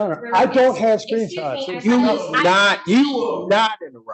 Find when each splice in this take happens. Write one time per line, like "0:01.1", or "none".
none